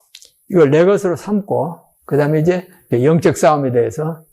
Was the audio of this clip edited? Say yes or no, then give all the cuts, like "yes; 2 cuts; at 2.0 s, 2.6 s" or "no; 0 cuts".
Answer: yes; 1 cut; at 2.9 s